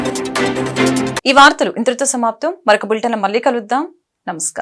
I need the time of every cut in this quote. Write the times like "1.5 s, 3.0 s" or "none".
none

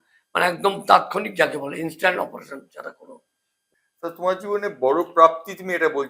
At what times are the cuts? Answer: 3.6 s

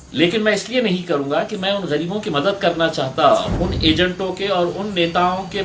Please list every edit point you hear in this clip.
3.4 s

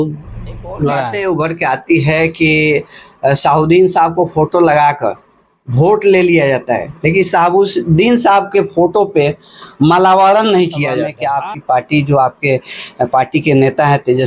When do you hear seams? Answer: 1.1 s, 11.1 s

